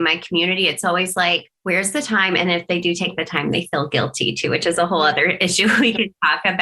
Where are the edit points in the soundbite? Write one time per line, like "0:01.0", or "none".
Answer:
0:01.5